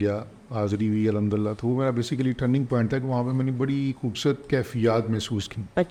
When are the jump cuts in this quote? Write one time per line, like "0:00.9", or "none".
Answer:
none

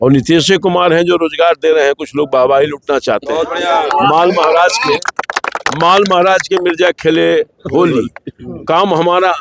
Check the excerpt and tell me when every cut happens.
none

